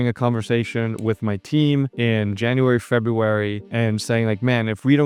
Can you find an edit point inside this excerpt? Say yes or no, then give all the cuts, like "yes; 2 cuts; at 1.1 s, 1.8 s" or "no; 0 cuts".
no; 0 cuts